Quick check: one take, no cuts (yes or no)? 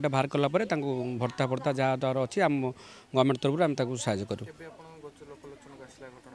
yes